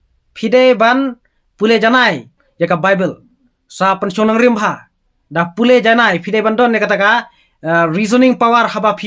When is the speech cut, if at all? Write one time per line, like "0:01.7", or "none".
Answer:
0:02.4